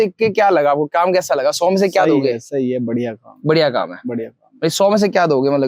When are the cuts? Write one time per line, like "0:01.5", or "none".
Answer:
none